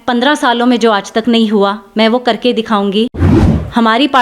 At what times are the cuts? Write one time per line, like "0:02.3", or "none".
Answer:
0:03.1